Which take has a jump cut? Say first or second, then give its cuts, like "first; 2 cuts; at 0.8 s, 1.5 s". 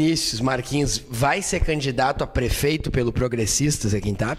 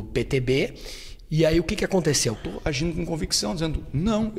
second; 1 cut; at 2.4 s